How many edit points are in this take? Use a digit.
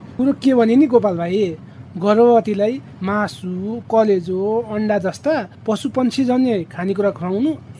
0